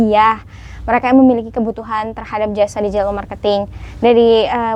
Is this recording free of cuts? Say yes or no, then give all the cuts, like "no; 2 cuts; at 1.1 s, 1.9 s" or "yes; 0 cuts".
yes; 0 cuts